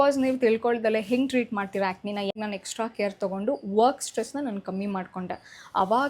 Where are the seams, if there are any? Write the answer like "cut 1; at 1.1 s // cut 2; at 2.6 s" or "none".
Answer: cut 1; at 2.3 s